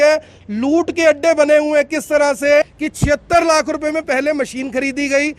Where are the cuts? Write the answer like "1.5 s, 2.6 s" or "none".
2.6 s